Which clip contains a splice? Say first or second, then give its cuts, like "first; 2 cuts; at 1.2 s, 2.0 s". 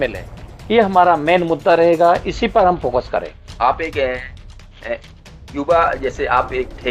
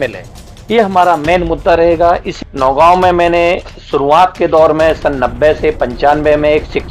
second; 1 cut; at 2.3 s